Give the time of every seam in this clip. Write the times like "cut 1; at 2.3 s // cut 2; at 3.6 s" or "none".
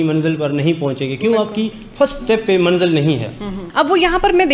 cut 1; at 3.5 s